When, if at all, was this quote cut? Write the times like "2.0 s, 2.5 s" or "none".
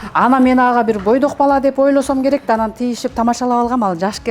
none